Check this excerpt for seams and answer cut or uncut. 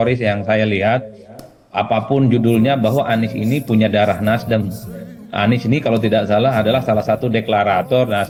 uncut